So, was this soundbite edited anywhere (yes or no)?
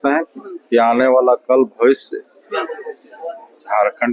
no